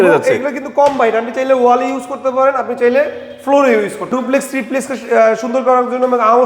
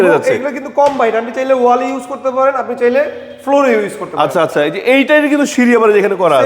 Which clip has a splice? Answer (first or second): first